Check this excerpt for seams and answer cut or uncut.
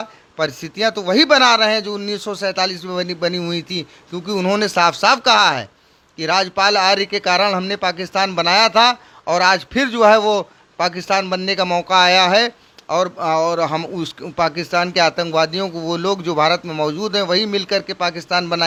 uncut